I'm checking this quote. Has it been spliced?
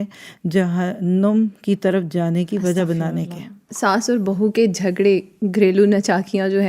yes; 1 cut; at 3.7 s

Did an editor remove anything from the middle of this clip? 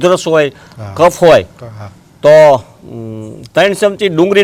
no; 0 cuts

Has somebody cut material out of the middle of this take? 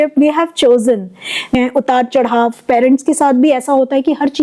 yes; 1 cut; at 1.6 s

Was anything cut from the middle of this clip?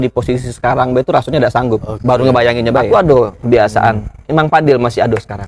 yes; 1 cut; at 2.8 s

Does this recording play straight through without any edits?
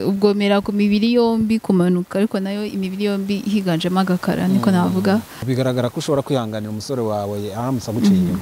no; 1 cut; at 5.4 s

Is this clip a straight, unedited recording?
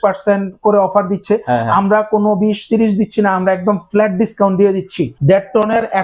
no; 1 cut; at 5.0 s

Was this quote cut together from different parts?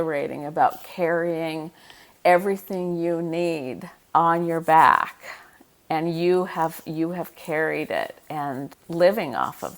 yes; 2 cuts; at 3.6 s, 8.7 s

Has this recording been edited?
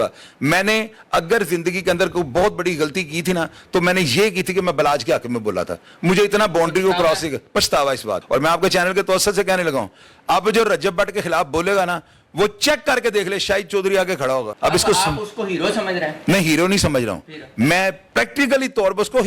yes; 2 cuts; at 8.2 s, 14.5 s

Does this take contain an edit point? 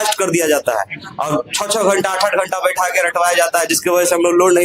no; 0 cuts

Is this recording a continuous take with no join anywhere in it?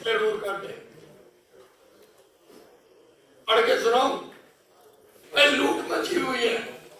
no; 1 cut; at 5.1 s

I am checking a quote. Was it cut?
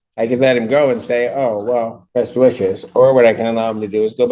yes; 1 cut; at 2.0 s

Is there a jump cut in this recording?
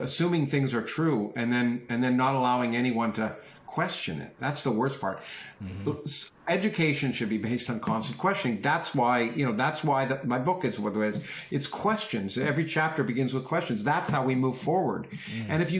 no; 0 cuts

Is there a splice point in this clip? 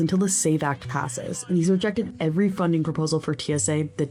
no; 0 cuts

